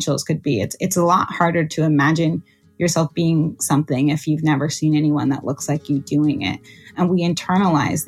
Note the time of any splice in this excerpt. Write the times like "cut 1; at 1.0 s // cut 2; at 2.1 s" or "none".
cut 1; at 6.9 s